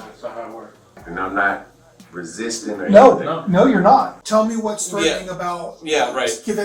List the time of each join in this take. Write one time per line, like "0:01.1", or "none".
0:01.1
0:04.2